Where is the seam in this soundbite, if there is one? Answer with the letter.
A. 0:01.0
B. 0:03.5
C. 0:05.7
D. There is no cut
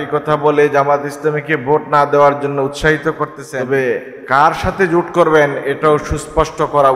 B